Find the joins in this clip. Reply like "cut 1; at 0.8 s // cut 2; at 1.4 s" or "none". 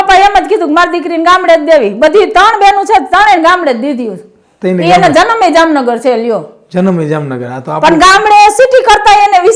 none